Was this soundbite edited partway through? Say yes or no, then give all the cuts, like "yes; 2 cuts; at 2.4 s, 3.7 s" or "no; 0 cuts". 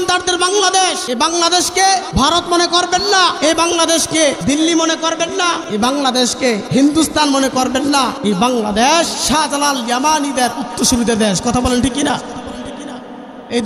yes; 8 cuts; at 1.0 s, 2.1 s, 3.4 s, 4.4 s, 5.6 s, 6.6 s, 8.2 s, 9.2 s